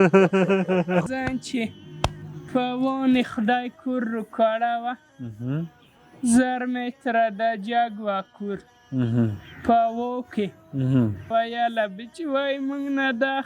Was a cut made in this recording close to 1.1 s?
yes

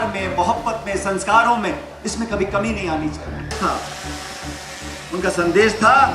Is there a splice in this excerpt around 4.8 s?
no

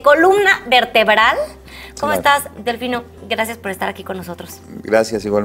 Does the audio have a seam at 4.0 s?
no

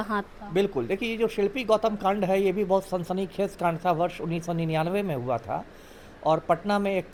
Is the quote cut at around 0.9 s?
no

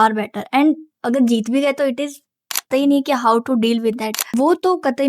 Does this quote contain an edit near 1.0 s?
no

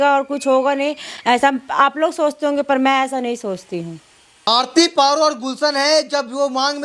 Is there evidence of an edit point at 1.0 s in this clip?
no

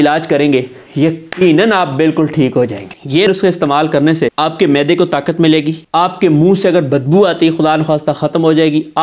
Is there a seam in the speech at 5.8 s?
yes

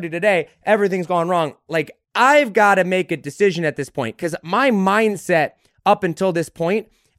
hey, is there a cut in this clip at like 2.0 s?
yes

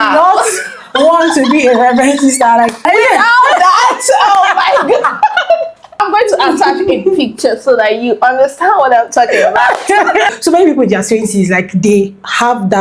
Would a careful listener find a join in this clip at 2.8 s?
yes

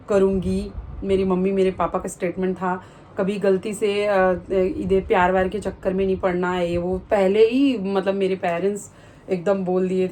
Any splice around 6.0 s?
no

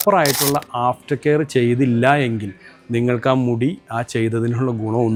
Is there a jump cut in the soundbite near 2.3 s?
no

